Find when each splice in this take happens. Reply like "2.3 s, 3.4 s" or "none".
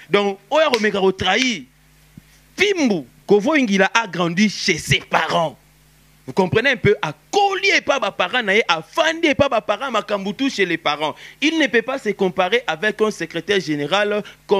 3.1 s